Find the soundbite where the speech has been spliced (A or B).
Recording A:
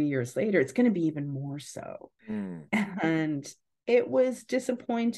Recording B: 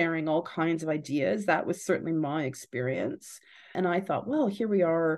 B